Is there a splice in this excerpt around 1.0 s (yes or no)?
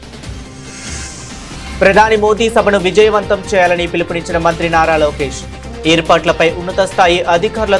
yes